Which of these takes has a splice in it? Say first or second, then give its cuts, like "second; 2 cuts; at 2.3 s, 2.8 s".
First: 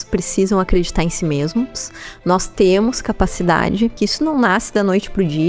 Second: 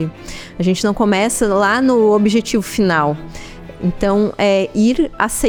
first; 1 cut; at 3.9 s